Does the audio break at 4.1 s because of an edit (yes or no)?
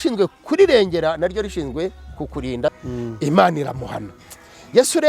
no